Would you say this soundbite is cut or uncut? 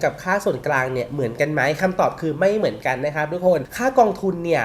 uncut